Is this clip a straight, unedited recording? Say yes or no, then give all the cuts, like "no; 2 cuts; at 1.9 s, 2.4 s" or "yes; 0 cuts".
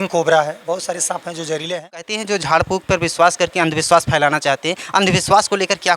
no; 1 cut; at 2.2 s